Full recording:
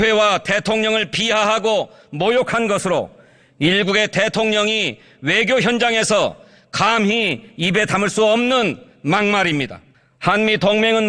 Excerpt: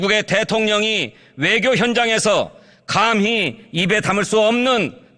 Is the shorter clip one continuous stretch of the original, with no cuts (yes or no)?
yes